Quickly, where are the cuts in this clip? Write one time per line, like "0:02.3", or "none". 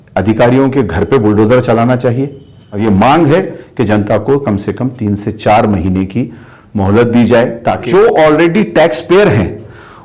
0:02.6
0:07.8